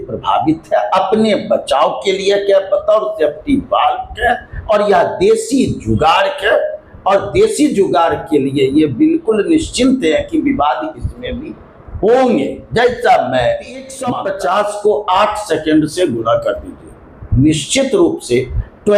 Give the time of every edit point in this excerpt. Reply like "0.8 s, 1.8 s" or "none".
14.0 s